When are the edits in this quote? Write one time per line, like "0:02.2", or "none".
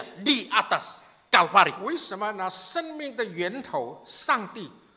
none